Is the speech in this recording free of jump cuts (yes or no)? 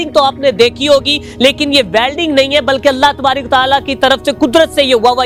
yes